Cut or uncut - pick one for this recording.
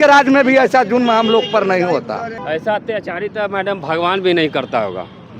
cut